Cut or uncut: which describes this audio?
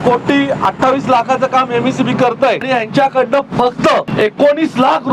cut